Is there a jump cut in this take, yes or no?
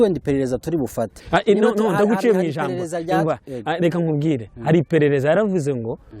no